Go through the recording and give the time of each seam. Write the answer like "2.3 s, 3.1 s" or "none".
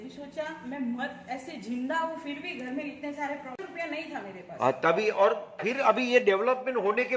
3.6 s